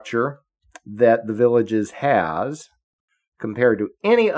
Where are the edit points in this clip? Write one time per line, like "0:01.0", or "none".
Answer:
none